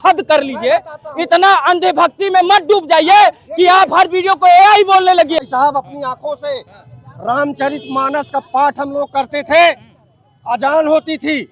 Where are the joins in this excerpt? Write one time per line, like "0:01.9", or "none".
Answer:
0:05.4